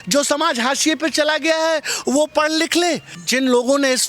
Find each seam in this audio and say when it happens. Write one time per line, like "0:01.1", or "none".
0:03.1